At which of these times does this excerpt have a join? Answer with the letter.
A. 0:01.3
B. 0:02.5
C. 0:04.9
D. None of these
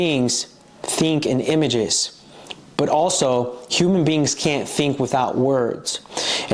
D